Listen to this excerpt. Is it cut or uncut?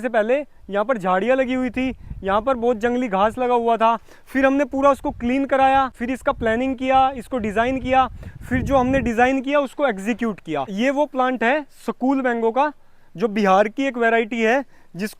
cut